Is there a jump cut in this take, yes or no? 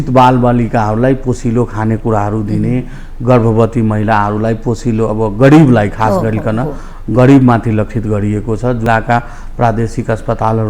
yes